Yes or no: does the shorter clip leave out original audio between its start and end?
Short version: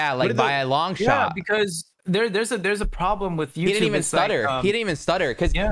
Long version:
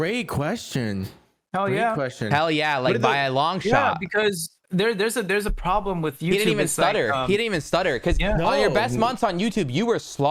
no